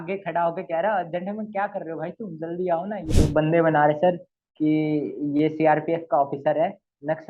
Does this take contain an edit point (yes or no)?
yes